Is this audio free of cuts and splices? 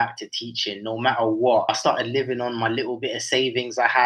no; 1 cut; at 1.8 s

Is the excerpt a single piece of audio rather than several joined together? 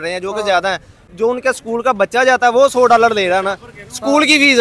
no; 1 cut; at 1.0 s

